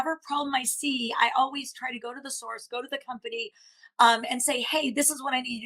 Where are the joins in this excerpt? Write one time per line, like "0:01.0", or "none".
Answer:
none